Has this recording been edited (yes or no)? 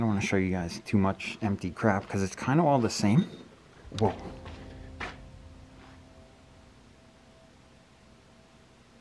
no